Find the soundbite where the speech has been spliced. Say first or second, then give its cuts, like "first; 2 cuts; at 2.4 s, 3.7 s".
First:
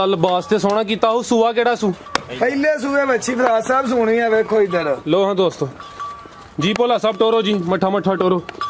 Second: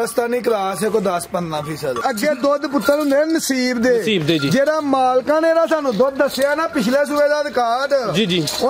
second; 1 cut; at 2.0 s